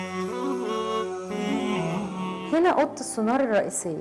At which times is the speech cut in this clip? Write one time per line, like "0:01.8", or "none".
0:02.1